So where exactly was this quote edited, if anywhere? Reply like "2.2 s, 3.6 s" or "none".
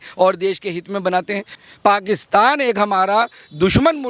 1.5 s

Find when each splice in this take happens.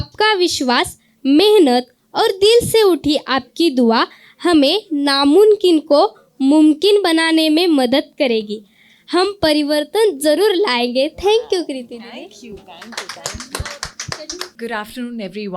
14.5 s

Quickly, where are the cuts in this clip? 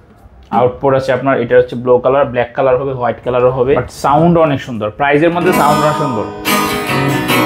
3.9 s

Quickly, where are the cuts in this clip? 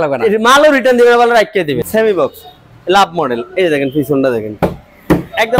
1.8 s

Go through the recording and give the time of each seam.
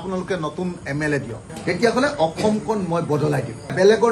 1.4 s

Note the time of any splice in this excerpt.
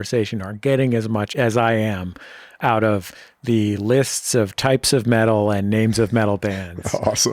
1.3 s, 2.5 s

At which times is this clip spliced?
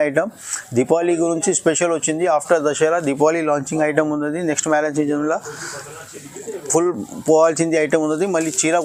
none

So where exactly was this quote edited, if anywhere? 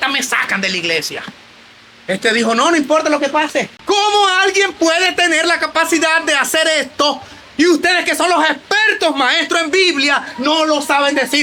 3.7 s

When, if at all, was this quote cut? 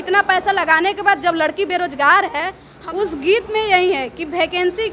2.6 s

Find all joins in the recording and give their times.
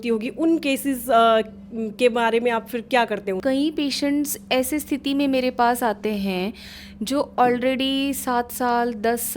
3.4 s

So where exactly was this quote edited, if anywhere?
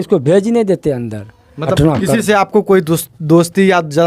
1.7 s

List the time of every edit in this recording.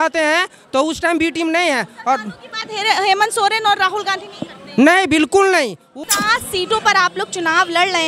5.9 s

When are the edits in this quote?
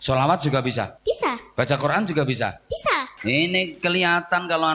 0.9 s, 3.1 s

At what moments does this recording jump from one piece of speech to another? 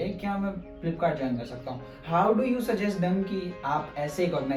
none

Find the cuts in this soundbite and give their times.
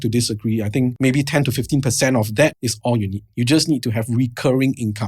0.9 s, 2.7 s

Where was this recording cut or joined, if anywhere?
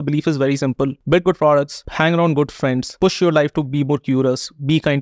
1.0 s, 1.8 s, 2.9 s

